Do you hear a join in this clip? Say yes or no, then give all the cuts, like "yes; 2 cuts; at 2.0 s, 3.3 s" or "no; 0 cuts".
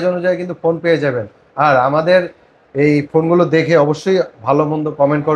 no; 0 cuts